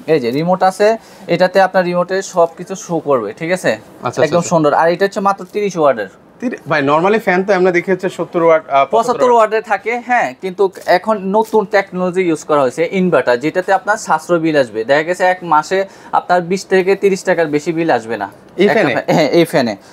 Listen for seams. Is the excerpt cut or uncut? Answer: uncut